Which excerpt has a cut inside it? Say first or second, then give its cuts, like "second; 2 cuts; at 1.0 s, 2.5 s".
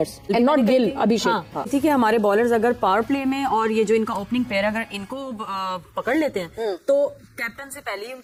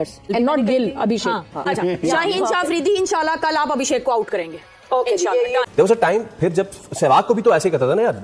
second; 2 cuts; at 1.5 s, 5.7 s